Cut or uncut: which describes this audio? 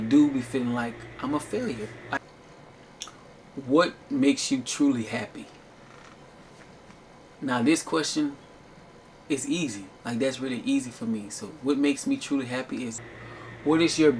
cut